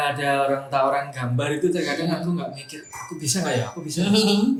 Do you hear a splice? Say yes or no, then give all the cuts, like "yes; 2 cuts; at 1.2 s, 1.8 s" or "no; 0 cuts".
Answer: no; 0 cuts